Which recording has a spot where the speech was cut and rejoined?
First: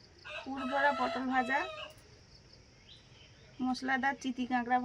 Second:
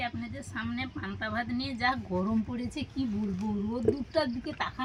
first; 1 cut; at 2.2 s

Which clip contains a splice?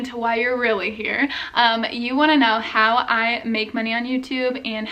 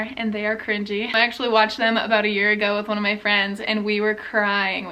second; 1 cut; at 1.1 s

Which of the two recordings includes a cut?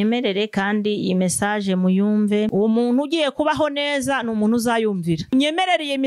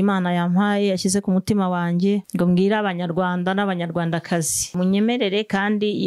first; 2 cuts; at 2.5 s, 5.3 s

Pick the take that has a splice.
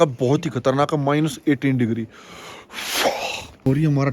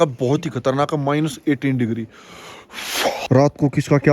second; 1 cut; at 3.2 s

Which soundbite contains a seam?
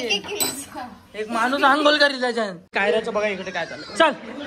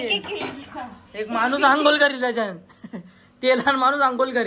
first; 1 cut; at 2.7 s

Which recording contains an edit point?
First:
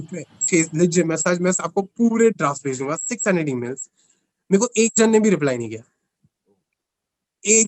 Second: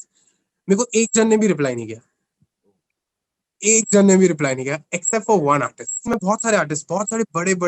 second; 1 cut; at 6.2 s

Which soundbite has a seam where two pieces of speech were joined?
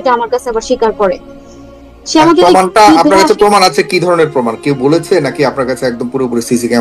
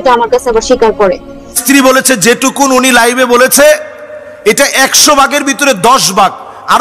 second; 1 cut; at 1.6 s

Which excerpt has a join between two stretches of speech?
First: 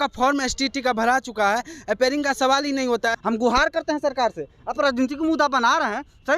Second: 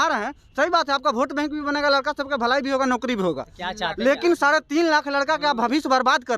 first; 1 cut; at 3.2 s

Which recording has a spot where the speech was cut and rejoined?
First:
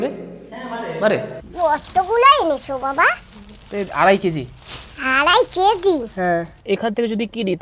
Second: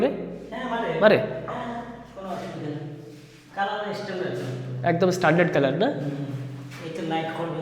first; 2 cuts; at 1.4 s, 6.5 s

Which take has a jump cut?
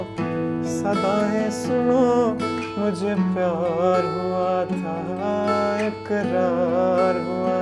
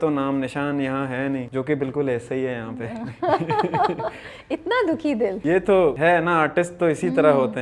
second; 3 cuts; at 1.5 s, 5.4 s, 6.0 s

